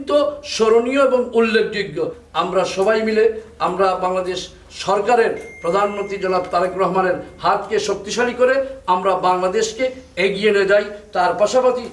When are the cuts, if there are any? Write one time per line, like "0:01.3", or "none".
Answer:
0:02.2